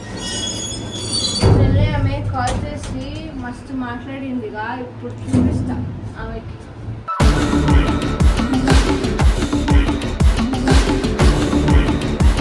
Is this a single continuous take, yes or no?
yes